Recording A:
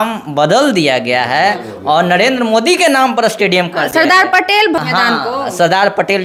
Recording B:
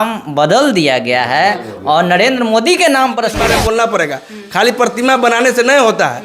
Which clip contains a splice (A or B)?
B